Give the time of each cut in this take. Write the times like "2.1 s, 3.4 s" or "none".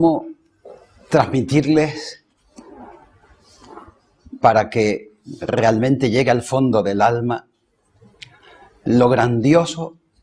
5.9 s

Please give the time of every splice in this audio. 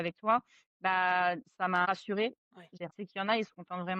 2.7 s

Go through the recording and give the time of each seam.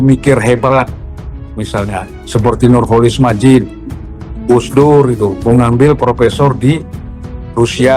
none

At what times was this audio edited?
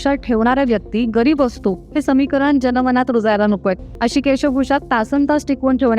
3.9 s

